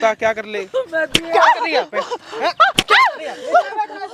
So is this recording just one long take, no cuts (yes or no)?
yes